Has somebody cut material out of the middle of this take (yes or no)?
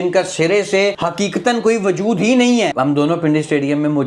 yes